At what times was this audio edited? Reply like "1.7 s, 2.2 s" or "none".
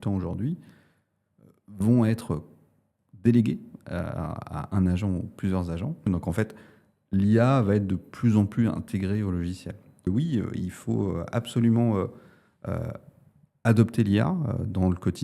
6.1 s, 10.0 s